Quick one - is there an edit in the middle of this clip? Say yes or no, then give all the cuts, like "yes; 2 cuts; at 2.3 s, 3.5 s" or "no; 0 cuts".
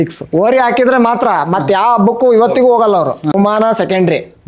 yes; 1 cut; at 3.3 s